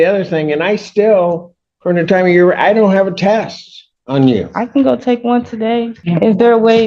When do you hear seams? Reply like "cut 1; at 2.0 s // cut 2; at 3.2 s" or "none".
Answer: cut 1; at 6.0 s